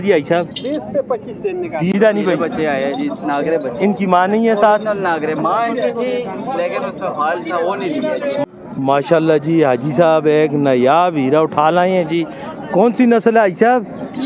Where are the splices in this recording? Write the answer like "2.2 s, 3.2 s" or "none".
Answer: 1.9 s, 8.4 s